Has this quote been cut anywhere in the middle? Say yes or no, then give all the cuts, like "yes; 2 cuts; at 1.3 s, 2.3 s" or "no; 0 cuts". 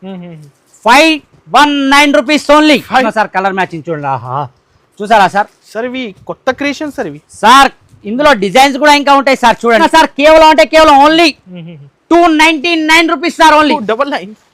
yes; 2 cuts; at 3.1 s, 9.8 s